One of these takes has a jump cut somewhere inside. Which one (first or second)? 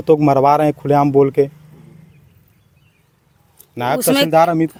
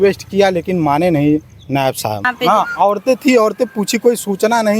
second